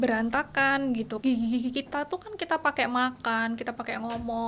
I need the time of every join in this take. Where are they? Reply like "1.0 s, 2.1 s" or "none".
1.1 s